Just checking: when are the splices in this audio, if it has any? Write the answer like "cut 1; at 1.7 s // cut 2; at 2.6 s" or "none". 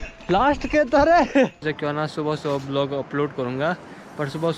cut 1; at 1.7 s